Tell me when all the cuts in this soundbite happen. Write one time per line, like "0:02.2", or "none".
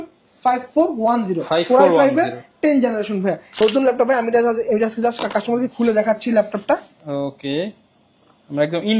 0:03.5